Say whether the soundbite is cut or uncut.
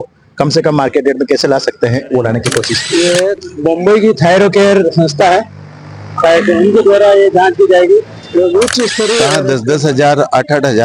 cut